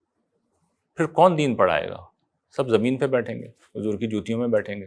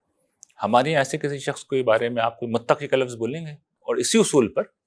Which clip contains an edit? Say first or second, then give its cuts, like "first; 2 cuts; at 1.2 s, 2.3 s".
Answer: second; 1 cut; at 3.7 s